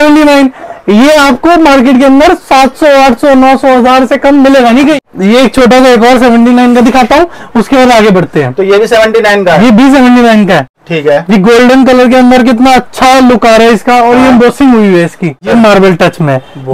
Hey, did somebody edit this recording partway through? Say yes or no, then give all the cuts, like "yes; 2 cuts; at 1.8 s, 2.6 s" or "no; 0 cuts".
yes; 3 cuts; at 5.0 s, 10.7 s, 15.5 s